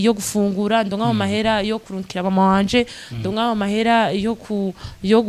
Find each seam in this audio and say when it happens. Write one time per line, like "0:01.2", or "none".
none